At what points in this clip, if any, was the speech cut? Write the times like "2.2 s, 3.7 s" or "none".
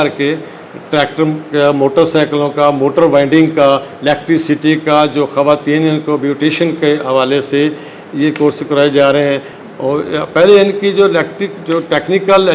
none